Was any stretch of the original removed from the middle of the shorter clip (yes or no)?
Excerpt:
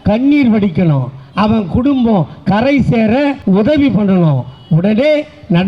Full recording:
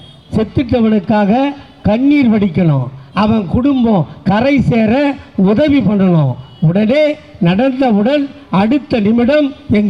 yes